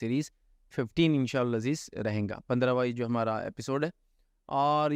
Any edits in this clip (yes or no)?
no